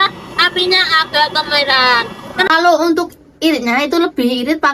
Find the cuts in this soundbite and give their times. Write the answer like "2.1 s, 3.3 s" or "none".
2.4 s